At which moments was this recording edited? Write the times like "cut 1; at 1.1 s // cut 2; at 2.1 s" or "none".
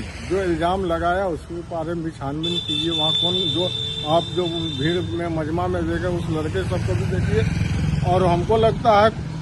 none